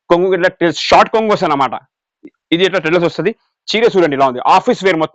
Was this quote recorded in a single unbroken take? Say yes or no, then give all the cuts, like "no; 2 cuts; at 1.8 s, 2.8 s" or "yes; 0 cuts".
yes; 0 cuts